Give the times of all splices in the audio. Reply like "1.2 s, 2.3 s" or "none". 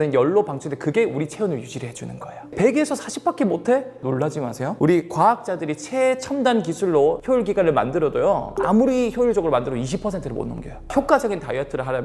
2.5 s, 4.0 s, 8.5 s, 10.9 s